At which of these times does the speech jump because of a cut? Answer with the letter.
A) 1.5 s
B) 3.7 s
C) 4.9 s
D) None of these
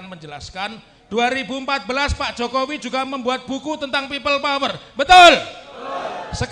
D